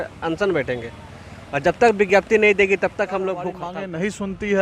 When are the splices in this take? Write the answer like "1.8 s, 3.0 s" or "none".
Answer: 3.6 s

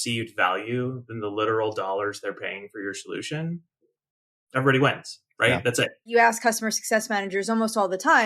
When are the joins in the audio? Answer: 6.0 s

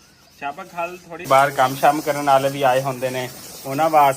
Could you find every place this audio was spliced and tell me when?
1.3 s

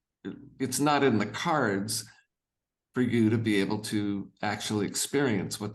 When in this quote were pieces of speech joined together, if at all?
none

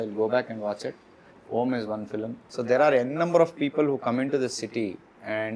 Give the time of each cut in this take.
2.4 s

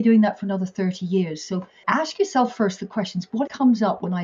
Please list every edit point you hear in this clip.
1.7 s, 3.5 s

